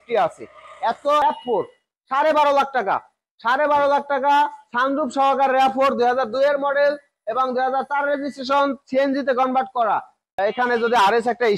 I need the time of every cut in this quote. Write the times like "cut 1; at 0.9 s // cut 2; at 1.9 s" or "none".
cut 1; at 1.2 s // cut 2; at 10.2 s

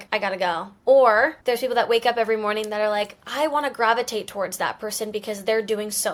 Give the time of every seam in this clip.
none

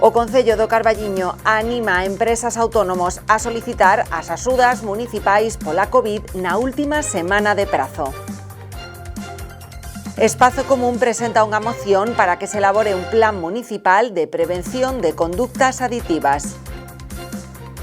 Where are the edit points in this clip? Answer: cut 1; at 16.4 s

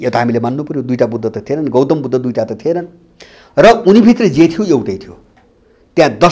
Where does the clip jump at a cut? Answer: none

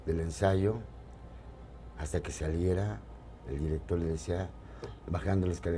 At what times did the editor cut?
none

